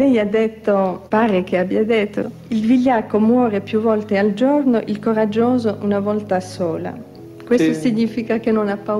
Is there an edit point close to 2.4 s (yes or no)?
yes